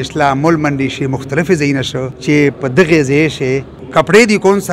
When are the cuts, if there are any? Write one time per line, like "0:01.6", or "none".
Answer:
0:02.1
0:03.8